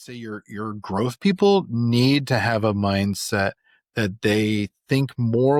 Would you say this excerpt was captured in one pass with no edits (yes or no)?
yes